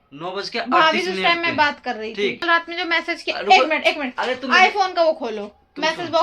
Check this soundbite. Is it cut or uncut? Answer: cut